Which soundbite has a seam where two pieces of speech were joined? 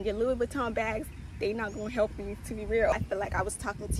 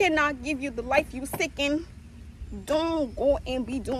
first; 1 cut; at 2.9 s

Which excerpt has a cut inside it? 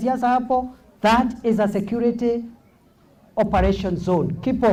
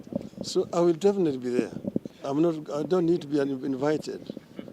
second; 1 cut; at 2.1 s

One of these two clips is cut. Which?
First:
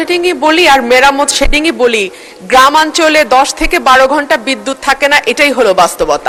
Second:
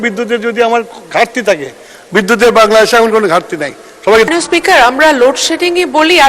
second; 1 cut; at 4.3 s

